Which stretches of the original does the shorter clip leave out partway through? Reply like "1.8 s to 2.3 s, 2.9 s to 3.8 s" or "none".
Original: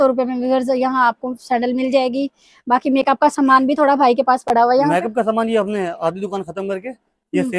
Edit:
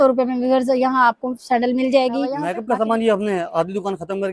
2.5 s to 5.0 s